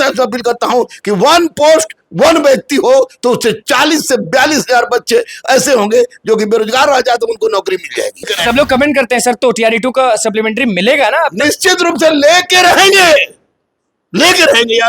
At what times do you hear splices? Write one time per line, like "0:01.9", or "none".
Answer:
0:08.3